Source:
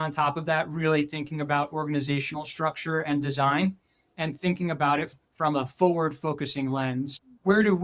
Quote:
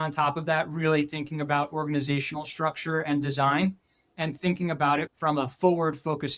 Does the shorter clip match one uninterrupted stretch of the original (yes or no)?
no